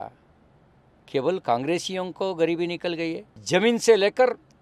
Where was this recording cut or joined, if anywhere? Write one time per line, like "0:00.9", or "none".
0:03.3

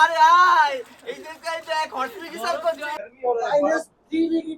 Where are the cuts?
0:03.0

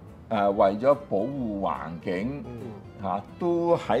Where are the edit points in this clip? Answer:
none

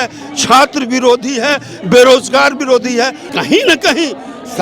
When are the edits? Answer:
0:03.3

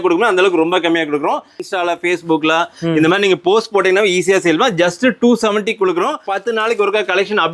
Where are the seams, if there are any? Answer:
0:01.6
0:06.3

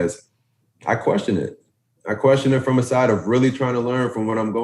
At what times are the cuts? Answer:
none

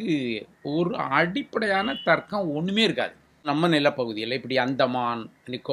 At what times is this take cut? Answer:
0:03.5

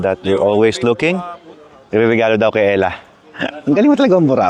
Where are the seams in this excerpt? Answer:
none

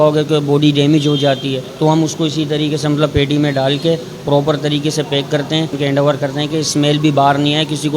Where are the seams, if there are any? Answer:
0:01.7
0:05.7

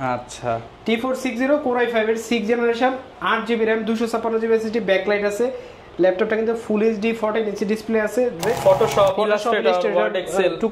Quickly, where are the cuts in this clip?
0:08.4

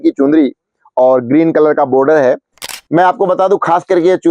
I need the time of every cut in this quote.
0:02.5

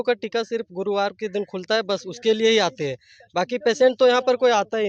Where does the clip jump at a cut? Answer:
none

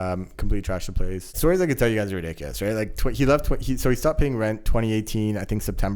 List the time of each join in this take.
0:01.3

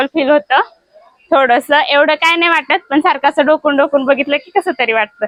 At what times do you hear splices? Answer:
none

